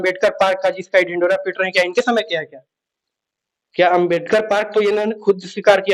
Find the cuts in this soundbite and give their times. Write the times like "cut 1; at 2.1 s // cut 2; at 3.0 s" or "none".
none